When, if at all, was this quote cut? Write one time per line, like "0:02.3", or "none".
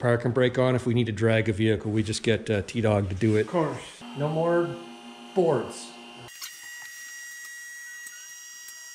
none

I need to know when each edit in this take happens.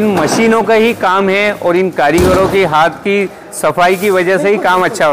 none

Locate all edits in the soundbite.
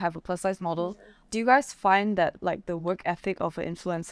0:01.1

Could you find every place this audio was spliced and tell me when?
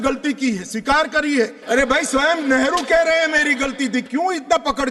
none

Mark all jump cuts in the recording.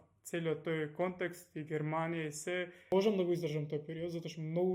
0:02.9

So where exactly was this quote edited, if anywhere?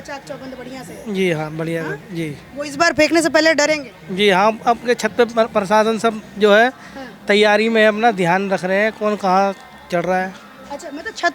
none

